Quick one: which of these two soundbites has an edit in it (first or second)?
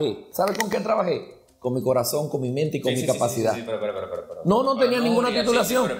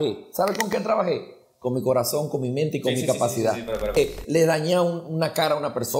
second